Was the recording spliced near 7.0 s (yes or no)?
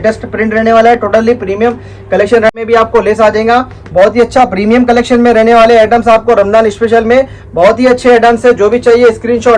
no